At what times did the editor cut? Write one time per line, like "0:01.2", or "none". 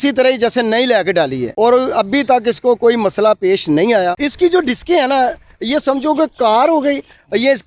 0:04.1